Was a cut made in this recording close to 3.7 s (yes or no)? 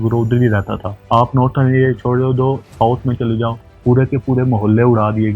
yes